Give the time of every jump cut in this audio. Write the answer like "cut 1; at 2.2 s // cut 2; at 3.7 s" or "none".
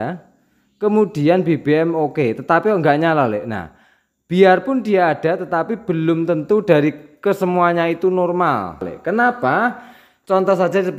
cut 1; at 8.9 s